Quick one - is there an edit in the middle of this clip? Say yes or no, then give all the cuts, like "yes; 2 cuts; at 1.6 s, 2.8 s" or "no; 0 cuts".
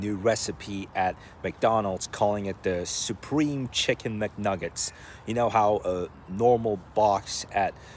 no; 0 cuts